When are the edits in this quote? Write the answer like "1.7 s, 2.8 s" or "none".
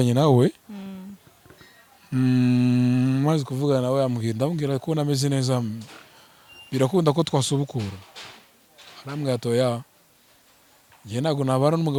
none